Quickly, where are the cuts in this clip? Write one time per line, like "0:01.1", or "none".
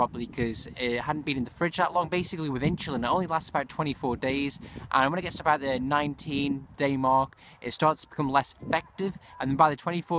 0:04.9